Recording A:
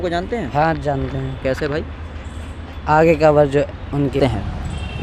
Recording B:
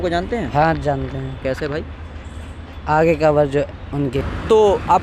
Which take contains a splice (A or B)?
B